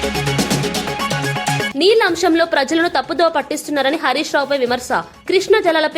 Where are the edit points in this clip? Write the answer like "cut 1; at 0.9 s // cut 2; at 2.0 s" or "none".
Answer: cut 1; at 1.7 s